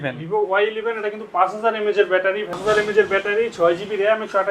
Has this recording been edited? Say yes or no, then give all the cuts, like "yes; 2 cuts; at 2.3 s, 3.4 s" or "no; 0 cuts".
yes; 1 cut; at 2.5 s